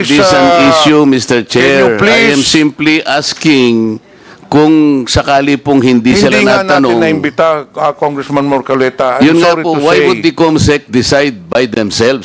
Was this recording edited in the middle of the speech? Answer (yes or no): no